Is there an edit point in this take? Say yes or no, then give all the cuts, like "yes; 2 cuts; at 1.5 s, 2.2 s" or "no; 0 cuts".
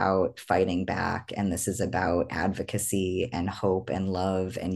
no; 0 cuts